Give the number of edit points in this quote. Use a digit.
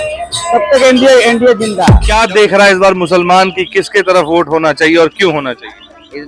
1